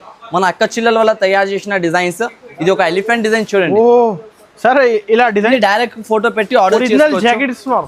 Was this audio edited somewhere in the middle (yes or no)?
yes